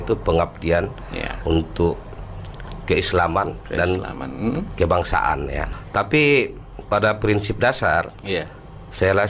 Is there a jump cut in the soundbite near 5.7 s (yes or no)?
yes